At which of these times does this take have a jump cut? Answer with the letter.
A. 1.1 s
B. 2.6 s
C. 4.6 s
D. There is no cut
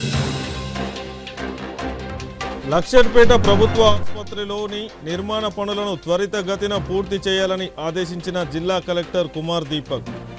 B